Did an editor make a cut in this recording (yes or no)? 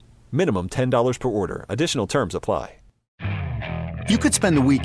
yes